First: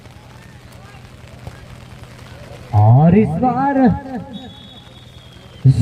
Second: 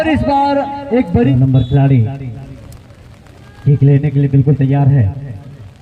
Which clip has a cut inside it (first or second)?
second